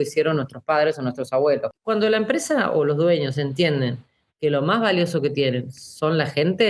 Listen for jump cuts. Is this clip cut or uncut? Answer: cut